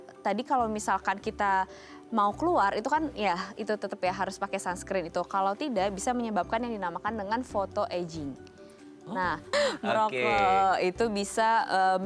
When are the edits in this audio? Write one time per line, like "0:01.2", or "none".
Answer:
0:09.5